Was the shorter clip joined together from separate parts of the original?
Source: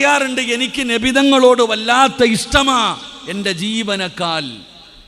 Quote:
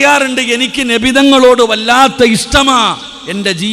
no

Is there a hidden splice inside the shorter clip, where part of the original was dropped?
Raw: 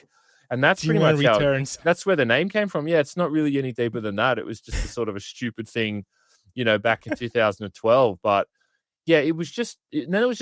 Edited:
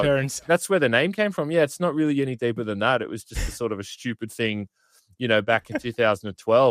no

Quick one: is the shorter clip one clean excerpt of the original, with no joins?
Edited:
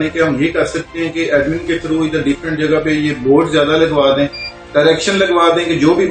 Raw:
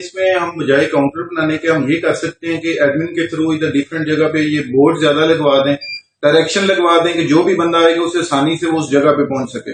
yes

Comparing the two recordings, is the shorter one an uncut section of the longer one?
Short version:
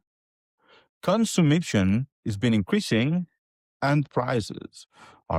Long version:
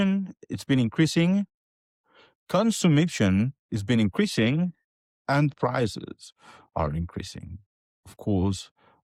yes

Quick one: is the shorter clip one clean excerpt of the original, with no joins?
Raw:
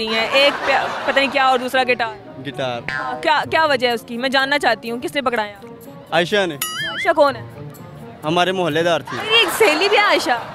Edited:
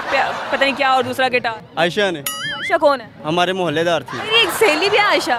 no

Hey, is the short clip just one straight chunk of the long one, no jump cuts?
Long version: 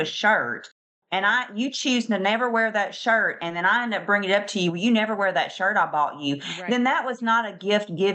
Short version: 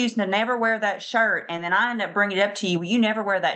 yes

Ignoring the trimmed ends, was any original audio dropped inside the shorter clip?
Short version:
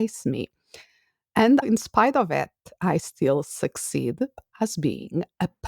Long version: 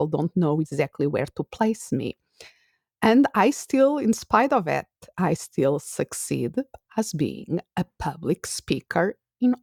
yes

